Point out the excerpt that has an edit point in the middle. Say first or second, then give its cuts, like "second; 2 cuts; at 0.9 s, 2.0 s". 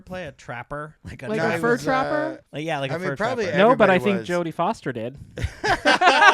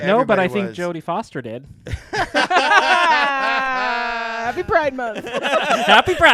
first; 2 cuts; at 1.0 s, 2.5 s